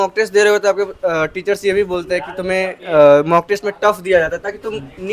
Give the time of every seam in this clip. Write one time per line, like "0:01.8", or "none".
none